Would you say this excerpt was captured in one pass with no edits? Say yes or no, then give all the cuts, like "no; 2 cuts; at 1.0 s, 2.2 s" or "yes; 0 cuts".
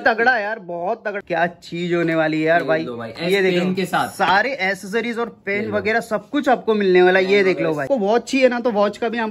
no; 2 cuts; at 1.1 s, 7.9 s